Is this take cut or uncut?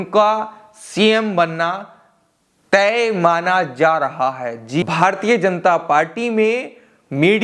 cut